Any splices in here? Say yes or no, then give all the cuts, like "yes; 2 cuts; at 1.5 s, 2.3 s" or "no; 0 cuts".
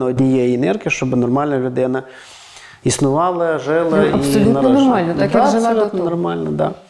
no; 0 cuts